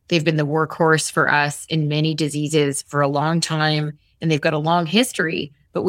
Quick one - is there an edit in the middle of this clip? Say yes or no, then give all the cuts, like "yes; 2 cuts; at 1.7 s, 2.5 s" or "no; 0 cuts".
no; 0 cuts